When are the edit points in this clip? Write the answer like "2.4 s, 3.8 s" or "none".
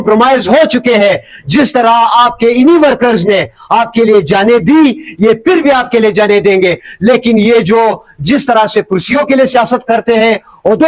none